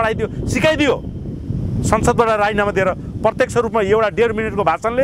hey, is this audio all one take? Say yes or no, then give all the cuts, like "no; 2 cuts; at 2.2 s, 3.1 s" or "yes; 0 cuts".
yes; 0 cuts